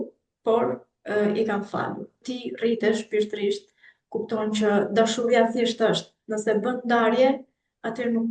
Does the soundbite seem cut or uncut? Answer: cut